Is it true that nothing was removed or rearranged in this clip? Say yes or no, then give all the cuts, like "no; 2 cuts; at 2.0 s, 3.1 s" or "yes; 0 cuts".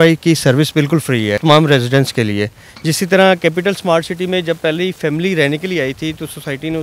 no; 1 cut; at 1.4 s